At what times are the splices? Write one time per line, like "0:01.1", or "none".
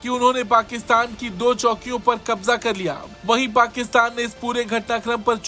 none